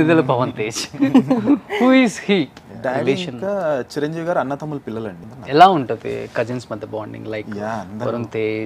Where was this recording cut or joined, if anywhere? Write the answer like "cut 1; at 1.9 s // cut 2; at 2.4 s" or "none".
cut 1; at 2.6 s // cut 2; at 5.3 s